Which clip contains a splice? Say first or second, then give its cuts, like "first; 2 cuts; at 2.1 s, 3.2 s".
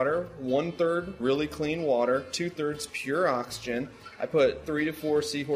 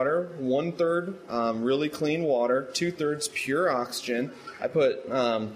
first; 2 cuts; at 1.2 s, 4.6 s